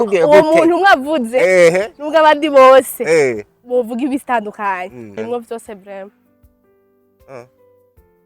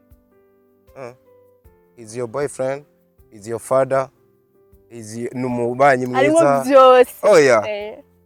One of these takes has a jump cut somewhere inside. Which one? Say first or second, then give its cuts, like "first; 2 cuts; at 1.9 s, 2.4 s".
first; 1 cut; at 5.2 s